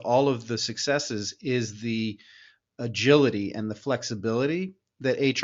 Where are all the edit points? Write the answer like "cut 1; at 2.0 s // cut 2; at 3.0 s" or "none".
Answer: none